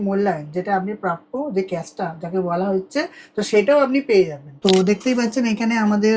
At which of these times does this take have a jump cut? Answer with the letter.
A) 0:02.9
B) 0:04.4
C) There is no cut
B